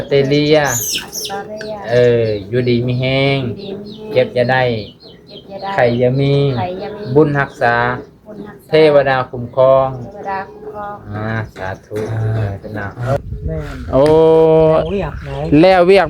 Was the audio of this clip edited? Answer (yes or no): yes